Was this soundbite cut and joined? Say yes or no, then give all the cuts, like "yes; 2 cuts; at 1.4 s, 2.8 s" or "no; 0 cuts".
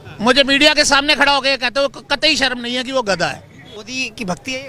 yes; 1 cut; at 3.7 s